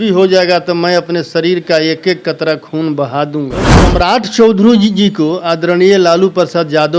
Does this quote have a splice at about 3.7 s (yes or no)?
yes